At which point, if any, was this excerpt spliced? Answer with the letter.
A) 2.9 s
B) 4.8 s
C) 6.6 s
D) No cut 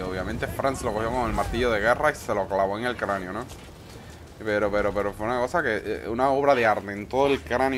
D